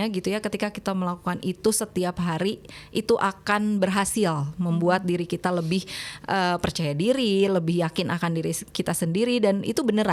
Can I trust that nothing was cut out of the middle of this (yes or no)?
yes